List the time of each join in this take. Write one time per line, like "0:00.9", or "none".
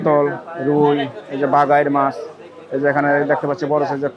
none